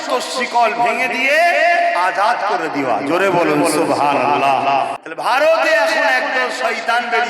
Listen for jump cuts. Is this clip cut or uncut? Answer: cut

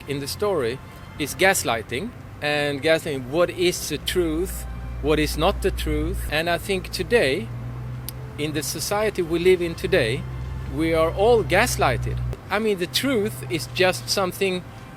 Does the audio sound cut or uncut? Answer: cut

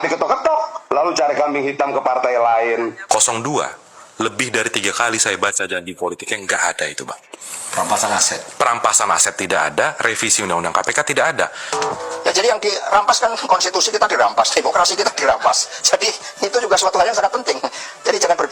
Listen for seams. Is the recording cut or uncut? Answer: cut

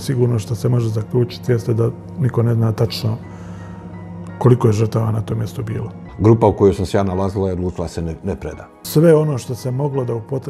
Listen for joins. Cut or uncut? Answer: cut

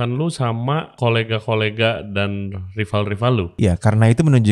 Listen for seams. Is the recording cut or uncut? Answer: cut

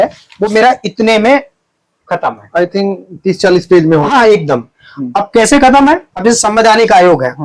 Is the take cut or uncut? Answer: uncut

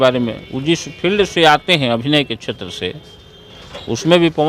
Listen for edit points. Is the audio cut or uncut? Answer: uncut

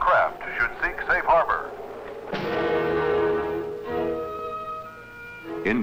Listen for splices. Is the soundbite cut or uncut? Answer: uncut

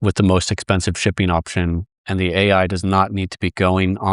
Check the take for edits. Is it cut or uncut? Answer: cut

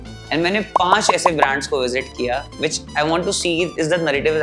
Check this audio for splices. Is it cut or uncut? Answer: uncut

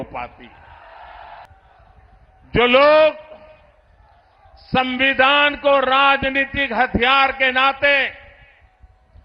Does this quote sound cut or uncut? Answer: cut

